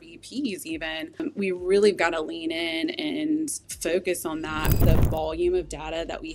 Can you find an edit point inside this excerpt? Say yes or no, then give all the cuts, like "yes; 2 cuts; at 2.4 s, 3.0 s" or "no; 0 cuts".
yes; 2 cuts; at 1.2 s, 4.8 s